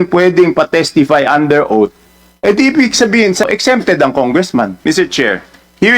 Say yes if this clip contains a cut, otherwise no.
yes